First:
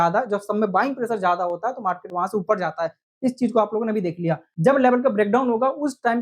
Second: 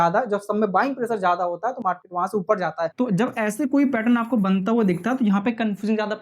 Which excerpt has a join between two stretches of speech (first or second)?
second